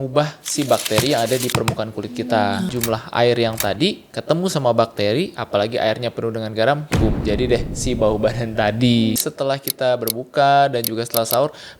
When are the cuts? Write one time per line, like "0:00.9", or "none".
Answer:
0:02.7
0:09.2